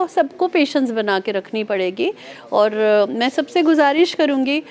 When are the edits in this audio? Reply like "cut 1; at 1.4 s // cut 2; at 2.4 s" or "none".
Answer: none